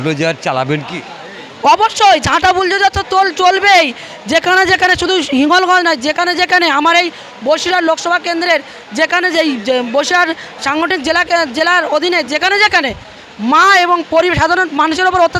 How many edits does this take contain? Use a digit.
0